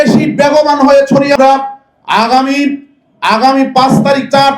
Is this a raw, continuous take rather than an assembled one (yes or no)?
no